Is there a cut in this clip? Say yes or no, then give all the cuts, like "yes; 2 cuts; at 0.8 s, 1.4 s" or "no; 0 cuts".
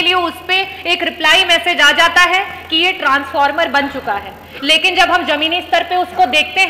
no; 0 cuts